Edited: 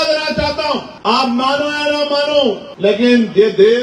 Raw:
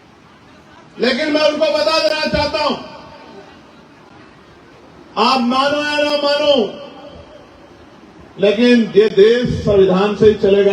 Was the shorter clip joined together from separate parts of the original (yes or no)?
yes